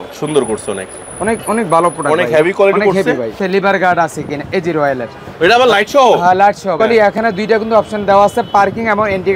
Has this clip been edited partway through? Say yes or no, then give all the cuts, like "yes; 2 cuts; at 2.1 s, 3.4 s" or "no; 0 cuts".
yes; 1 cut; at 3.4 s